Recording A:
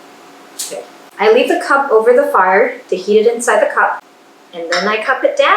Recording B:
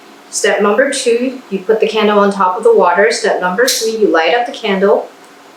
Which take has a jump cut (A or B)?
A